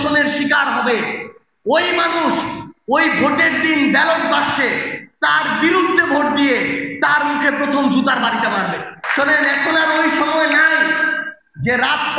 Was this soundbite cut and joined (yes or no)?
yes